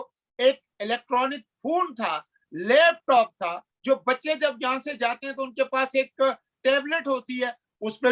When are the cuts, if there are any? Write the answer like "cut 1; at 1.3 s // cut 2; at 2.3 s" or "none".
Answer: none